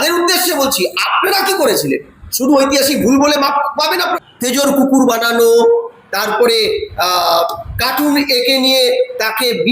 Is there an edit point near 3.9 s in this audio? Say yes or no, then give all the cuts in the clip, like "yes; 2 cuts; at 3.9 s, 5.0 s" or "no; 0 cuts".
yes; 1 cut; at 3.9 s